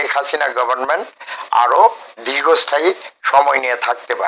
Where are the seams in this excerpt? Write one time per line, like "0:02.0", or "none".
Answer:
none

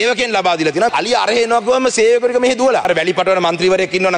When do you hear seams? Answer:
0:00.9
0:02.9

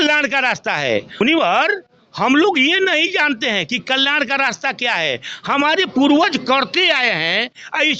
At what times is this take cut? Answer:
0:01.2

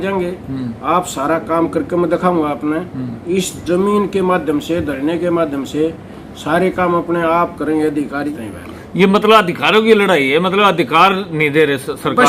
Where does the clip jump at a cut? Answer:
0:08.4

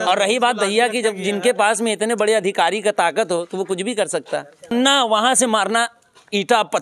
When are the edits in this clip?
0:04.7

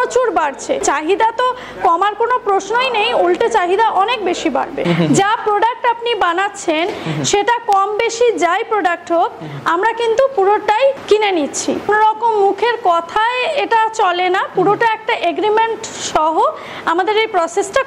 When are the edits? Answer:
0:00.8
0:04.8
0:11.0
0:11.9

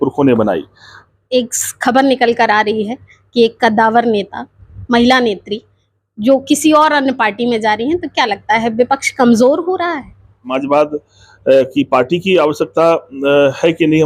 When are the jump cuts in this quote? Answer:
0:01.0
0:10.5

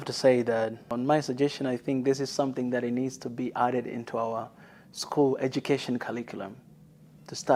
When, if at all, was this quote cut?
0:00.9

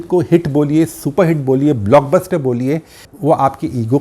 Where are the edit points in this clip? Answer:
0:03.1

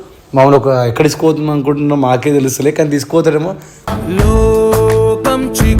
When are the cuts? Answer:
none

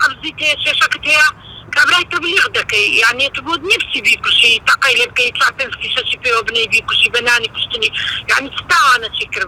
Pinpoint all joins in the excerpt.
none

